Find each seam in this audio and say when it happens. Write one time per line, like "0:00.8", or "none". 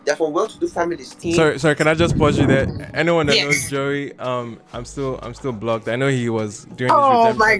0:01.1